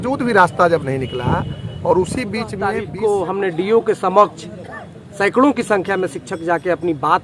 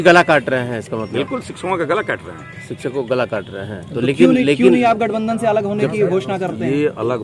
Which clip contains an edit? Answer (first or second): first